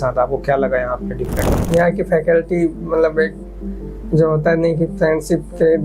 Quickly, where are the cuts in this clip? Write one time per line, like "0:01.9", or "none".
0:01.6